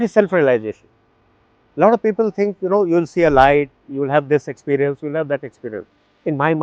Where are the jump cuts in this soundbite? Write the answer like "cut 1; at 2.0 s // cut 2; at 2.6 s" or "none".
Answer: none